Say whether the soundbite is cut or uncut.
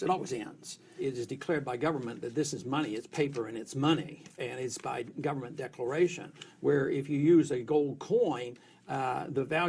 cut